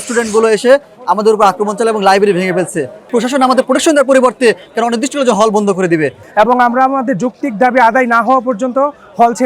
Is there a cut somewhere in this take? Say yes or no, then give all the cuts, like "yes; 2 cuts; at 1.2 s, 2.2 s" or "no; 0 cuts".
yes; 2 cuts; at 3.1 s, 6.2 s